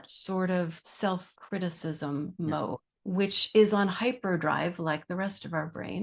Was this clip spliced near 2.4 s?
yes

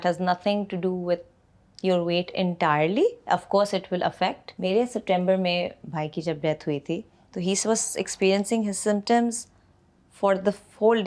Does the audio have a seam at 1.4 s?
no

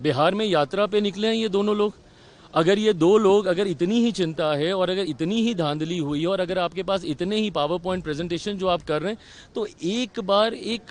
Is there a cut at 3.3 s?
no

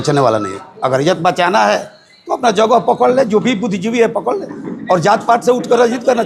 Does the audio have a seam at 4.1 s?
no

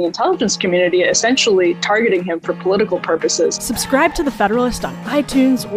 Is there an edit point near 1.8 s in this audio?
no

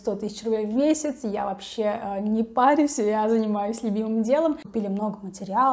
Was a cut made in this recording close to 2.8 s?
no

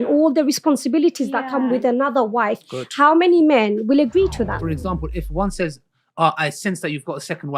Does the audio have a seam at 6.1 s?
no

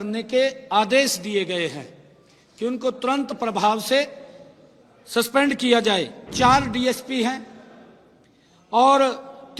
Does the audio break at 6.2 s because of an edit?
yes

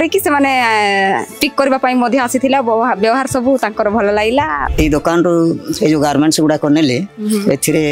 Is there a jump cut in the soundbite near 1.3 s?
no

